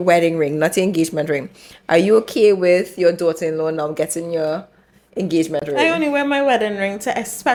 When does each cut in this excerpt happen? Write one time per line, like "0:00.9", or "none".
none